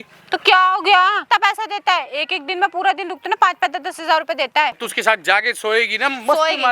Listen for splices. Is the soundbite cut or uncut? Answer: cut